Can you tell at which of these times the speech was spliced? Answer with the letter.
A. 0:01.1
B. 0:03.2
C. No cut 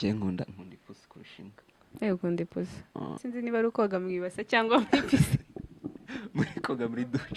B